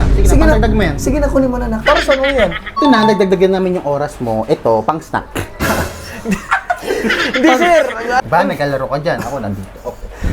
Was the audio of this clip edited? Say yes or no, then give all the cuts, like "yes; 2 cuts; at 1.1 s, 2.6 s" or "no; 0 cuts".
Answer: yes; 2 cuts; at 2.7 s, 8.3 s